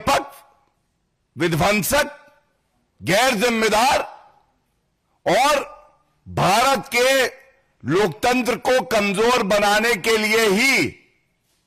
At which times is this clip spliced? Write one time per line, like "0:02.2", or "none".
none